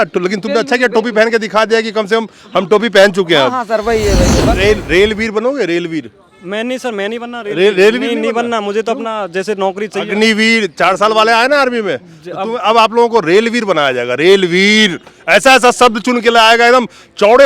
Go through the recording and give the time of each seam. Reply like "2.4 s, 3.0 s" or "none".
4.4 s